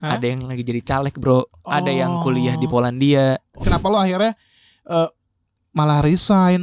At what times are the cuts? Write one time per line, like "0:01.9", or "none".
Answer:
0:03.6